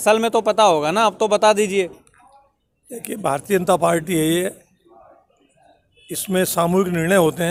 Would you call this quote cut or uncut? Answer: uncut